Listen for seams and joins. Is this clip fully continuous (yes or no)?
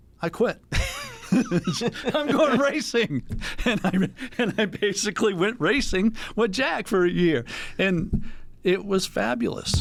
yes